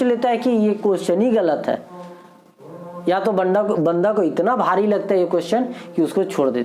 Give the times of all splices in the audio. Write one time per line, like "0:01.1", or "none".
none